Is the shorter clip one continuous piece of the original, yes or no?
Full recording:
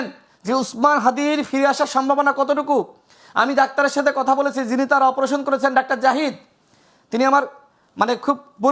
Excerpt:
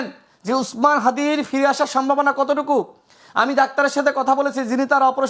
yes